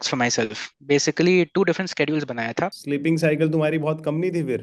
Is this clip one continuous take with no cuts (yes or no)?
no